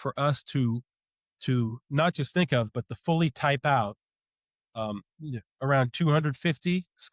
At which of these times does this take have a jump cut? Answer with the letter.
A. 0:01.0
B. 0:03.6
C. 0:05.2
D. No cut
D